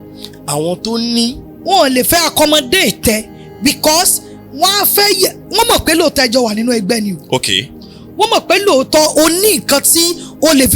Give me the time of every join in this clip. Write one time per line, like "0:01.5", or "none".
0:01.5